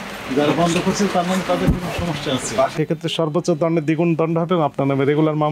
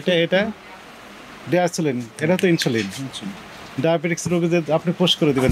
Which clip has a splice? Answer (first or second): first